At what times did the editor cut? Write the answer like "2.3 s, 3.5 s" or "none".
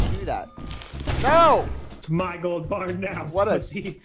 2.0 s